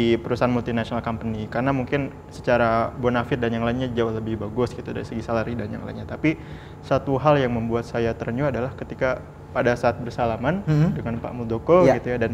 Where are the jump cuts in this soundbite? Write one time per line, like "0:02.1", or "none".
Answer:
none